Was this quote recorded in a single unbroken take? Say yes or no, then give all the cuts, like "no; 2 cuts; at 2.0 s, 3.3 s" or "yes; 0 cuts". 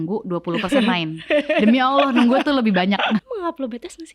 no; 1 cut; at 3.3 s